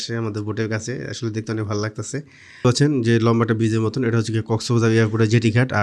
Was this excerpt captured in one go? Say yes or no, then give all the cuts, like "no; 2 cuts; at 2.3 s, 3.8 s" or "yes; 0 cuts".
no; 1 cut; at 2.6 s